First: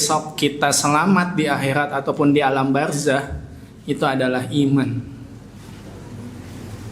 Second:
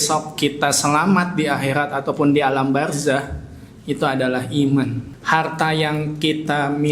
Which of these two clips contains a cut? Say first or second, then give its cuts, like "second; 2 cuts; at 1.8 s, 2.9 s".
second; 1 cut; at 5.1 s